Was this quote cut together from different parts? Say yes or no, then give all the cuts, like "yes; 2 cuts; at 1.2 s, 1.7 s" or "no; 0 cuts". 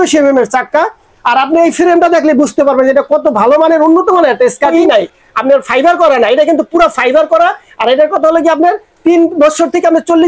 yes; 1 cut; at 4.7 s